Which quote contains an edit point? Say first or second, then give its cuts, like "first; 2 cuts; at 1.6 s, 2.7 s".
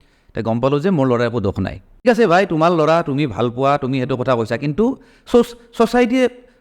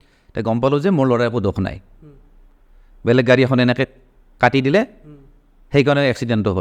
first; 1 cut; at 2.0 s